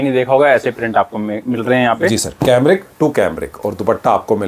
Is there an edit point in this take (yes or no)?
no